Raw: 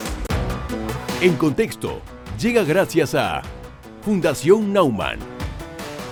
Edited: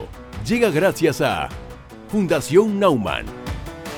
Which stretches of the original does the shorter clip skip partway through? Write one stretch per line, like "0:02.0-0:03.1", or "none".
none